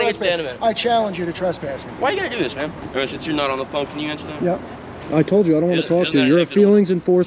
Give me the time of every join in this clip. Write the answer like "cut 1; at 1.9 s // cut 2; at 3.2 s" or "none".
cut 1; at 2.8 s